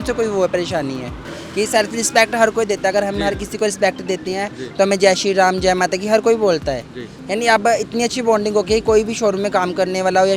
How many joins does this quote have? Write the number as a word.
one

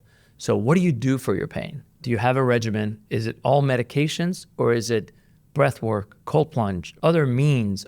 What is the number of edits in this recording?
three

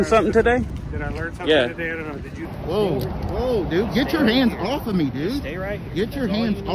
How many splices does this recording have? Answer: one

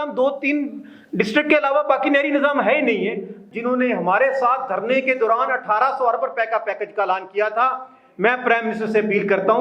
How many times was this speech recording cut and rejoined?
one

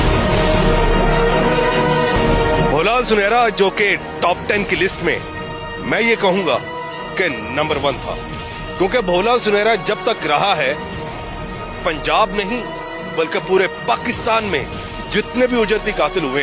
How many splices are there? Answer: one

